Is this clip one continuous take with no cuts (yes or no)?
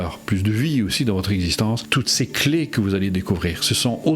no